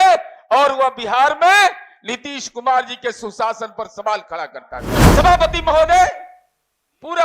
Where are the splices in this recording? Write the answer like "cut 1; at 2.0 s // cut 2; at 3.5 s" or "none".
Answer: cut 1; at 5.1 s